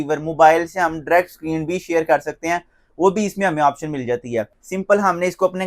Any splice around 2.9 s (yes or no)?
no